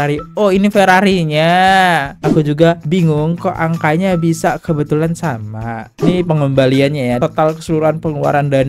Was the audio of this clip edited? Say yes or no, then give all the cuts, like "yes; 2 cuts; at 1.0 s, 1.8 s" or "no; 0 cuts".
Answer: yes; 1 cut; at 2.1 s